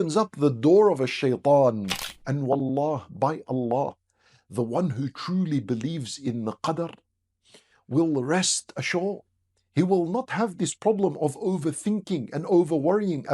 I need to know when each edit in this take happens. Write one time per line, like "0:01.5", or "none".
0:02.1